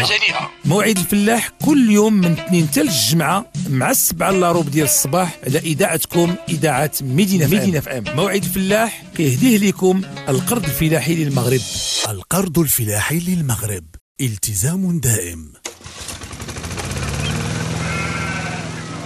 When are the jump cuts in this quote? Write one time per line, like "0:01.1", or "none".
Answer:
0:15.6